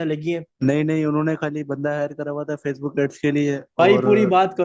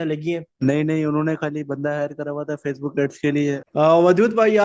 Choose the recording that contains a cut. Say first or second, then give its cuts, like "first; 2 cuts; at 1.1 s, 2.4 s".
second; 1 cut; at 3.6 s